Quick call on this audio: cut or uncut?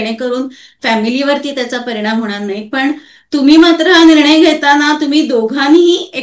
uncut